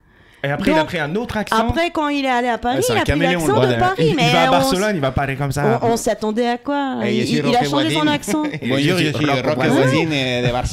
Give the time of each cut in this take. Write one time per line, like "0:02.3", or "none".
none